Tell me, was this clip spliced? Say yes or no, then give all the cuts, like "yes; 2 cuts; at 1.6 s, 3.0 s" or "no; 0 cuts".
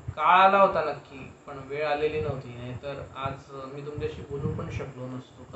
no; 0 cuts